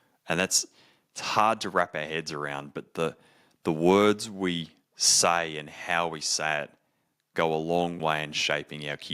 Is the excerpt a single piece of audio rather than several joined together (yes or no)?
no